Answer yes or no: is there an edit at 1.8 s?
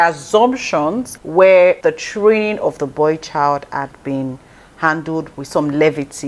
yes